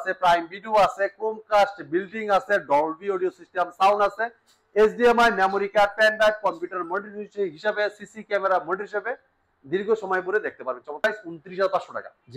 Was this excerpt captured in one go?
no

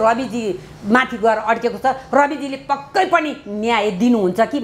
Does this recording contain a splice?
no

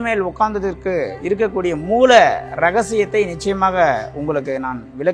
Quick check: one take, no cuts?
yes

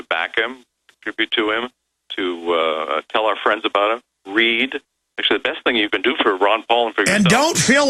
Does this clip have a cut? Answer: no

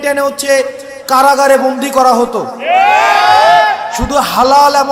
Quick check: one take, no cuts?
yes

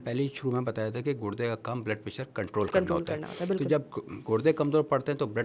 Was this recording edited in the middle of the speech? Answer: no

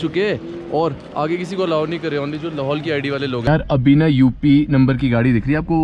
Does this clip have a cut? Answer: yes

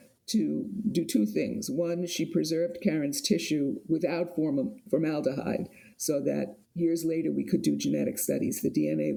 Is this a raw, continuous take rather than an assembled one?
yes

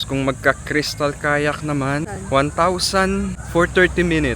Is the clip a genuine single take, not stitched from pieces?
no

